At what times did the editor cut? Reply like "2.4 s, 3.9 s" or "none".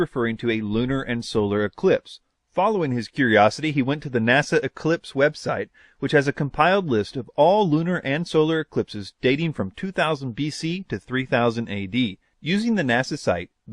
10.6 s